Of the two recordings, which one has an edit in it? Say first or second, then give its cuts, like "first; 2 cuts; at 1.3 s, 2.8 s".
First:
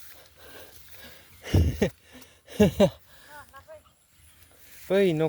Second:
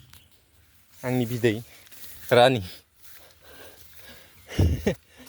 second; 1 cut; at 1.9 s